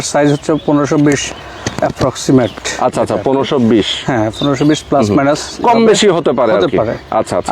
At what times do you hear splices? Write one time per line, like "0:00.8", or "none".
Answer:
none